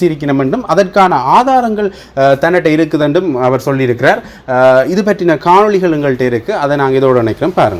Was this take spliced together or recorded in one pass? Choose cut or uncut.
uncut